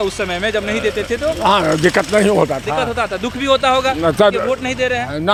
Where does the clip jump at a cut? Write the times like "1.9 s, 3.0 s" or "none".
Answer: none